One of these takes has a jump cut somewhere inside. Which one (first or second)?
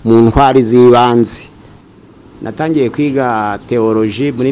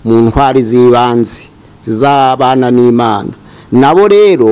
first